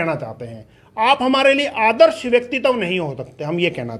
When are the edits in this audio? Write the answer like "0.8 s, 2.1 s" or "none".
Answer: none